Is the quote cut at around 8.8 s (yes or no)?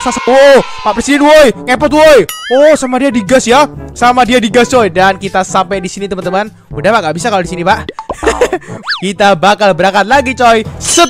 yes